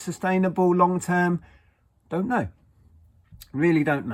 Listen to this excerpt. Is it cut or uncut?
uncut